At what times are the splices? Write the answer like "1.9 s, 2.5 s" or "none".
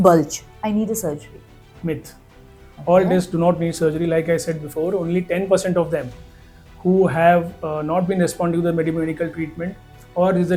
none

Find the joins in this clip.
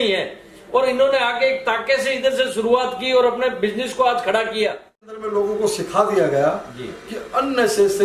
5.2 s

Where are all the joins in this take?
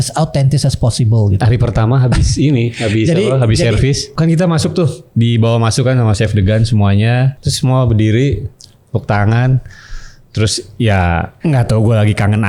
1.4 s, 4.1 s, 7.4 s, 11.3 s

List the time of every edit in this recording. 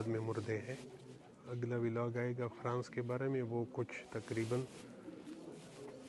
1.4 s

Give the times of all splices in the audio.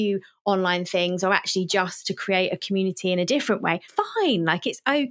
3.8 s

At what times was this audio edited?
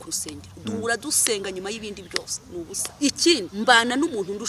2.8 s, 3.5 s

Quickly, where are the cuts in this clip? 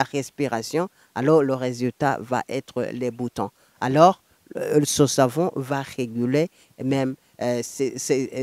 none

